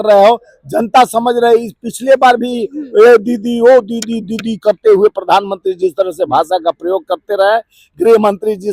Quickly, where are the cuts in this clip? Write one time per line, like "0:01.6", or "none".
none